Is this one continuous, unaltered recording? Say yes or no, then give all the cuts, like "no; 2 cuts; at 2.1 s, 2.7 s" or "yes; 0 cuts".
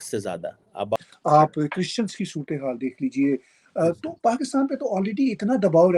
no; 1 cut; at 1.0 s